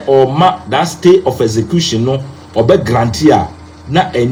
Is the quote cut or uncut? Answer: uncut